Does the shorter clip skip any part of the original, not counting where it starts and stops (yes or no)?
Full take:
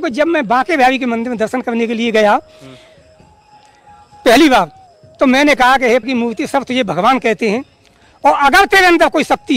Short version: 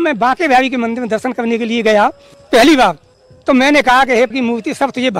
yes